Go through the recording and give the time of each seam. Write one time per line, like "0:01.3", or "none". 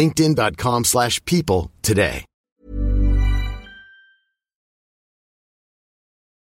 none